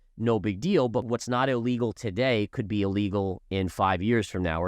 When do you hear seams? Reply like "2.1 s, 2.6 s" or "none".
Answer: 1.0 s

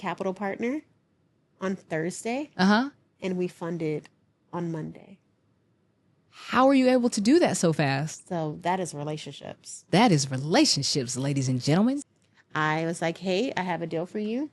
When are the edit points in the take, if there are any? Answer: 12.0 s

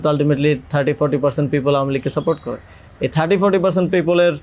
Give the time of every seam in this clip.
none

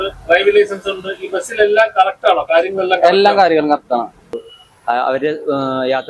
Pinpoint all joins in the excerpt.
4.5 s

